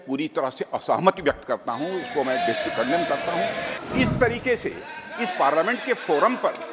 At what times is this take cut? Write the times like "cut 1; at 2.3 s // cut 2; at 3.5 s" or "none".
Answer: cut 1; at 3.7 s